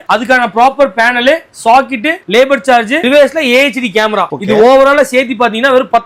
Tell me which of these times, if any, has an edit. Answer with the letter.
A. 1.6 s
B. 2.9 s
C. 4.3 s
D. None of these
D